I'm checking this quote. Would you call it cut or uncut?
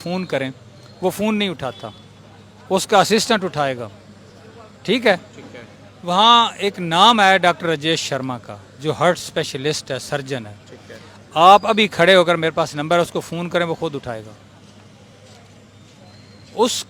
uncut